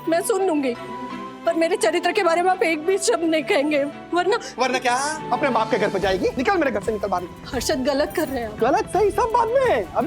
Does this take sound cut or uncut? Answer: cut